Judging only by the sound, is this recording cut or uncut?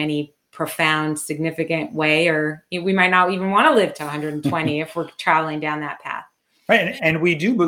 uncut